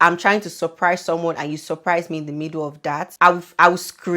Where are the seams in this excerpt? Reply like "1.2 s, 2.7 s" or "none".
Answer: 3.1 s